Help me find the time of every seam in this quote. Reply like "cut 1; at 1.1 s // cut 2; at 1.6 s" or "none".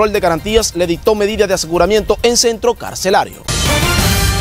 cut 1; at 3.4 s

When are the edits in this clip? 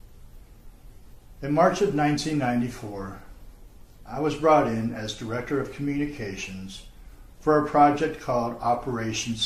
none

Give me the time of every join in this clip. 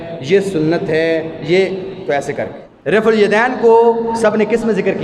cut 1; at 2.6 s

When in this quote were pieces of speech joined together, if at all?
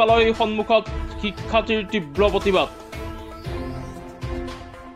none

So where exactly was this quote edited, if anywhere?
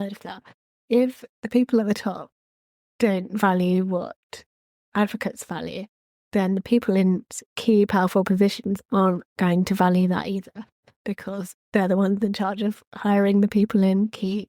none

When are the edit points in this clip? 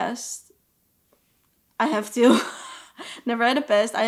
none

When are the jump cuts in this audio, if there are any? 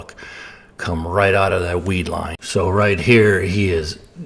cut 1; at 2.3 s

